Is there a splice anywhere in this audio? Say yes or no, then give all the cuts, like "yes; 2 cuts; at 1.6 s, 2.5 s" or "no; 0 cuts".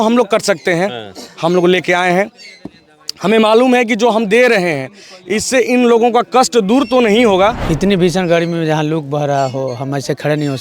yes; 1 cut; at 7.6 s